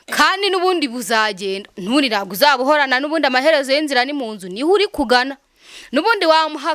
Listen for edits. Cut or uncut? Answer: uncut